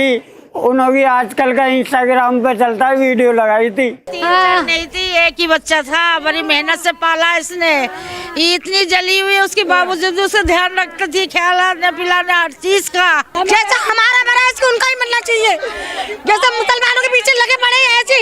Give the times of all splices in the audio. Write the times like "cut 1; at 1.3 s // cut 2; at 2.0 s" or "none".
cut 1; at 4.1 s // cut 2; at 13.3 s

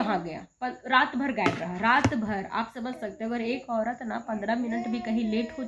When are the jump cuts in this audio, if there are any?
none

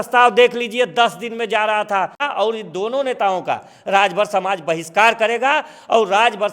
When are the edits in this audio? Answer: cut 1; at 2.3 s

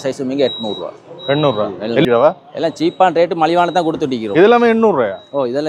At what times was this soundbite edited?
cut 1; at 2.0 s

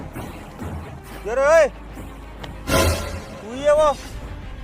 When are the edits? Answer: cut 1; at 1.1 s

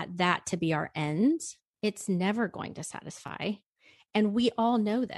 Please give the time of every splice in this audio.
none

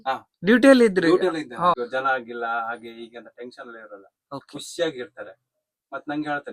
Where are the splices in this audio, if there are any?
cut 1; at 1.8 s

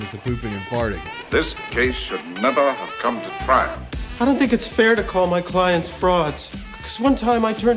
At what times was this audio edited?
cut 1; at 1.1 s

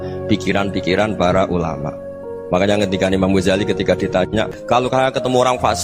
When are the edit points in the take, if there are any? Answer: cut 1; at 4.6 s

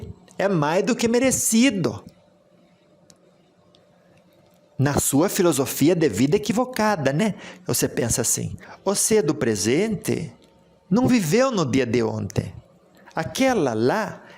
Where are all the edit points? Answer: cut 1; at 8.6 s

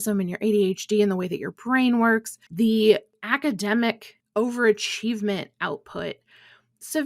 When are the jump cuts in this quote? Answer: cut 1; at 2.5 s // cut 2; at 3.2 s // cut 3; at 4.1 s

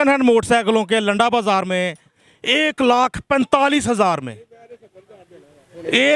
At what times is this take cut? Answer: cut 1; at 2.2 s

